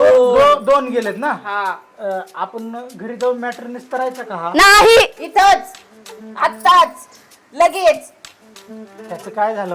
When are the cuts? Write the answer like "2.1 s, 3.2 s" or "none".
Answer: none